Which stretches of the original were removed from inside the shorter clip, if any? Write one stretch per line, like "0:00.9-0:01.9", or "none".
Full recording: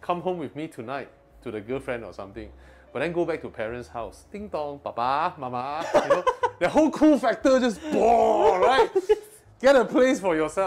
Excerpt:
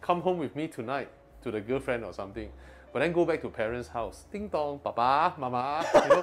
none